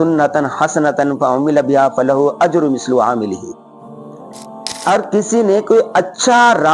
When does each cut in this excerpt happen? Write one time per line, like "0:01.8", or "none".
none